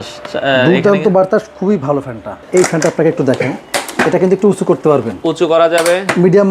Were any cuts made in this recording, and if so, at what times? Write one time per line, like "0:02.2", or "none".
0:02.3